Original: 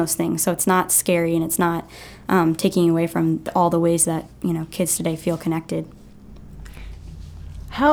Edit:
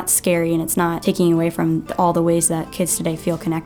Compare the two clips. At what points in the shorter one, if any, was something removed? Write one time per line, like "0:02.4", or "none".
0:01.0
0:02.7